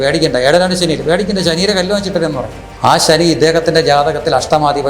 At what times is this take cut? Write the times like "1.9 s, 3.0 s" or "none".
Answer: 2.6 s